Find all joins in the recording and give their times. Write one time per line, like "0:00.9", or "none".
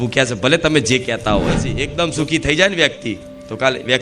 0:01.8